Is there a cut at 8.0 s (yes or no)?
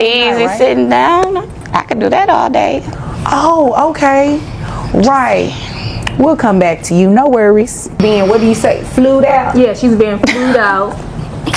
yes